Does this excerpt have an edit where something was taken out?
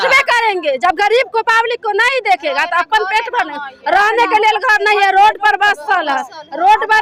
no; 0 cuts

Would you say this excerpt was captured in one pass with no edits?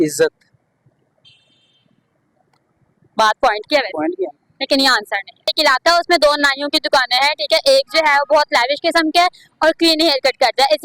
no; 1 cut; at 5.5 s

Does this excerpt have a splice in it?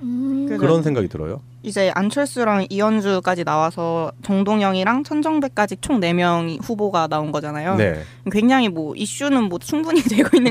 no; 0 cuts

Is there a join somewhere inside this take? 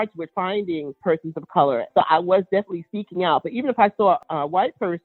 yes; 2 cuts; at 1.0 s, 1.9 s

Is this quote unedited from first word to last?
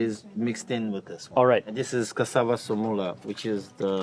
no; 1 cut; at 1.7 s

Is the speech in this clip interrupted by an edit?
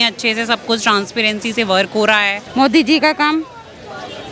yes; 1 cut; at 2.4 s

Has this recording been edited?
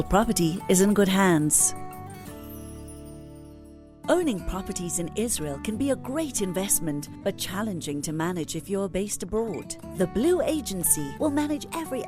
yes; 2 cuts; at 1.5 s, 3.9 s

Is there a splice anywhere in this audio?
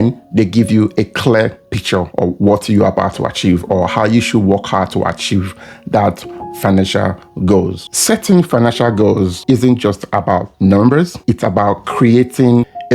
yes; 2 cuts; at 7.8 s, 9.4 s

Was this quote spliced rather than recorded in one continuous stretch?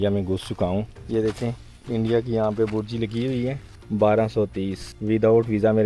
yes; 3 cuts; at 1.0 s, 3.7 s, 4.9 s

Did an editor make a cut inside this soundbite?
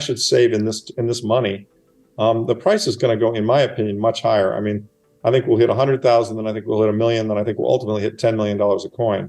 no; 0 cuts

